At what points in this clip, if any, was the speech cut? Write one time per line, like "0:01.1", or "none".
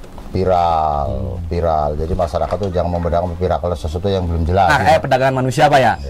0:04.7